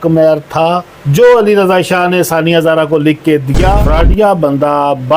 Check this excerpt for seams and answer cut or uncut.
cut